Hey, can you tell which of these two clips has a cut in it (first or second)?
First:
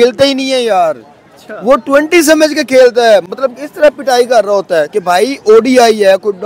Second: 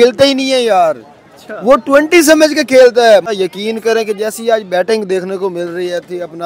second